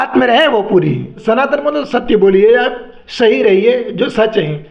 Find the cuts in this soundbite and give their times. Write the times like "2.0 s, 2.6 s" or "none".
1.1 s